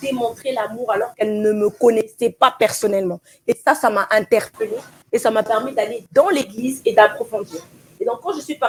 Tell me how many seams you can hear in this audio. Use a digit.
0